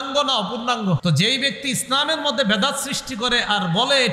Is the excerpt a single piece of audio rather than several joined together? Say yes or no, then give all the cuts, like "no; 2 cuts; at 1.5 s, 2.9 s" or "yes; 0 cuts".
no; 1 cut; at 1.0 s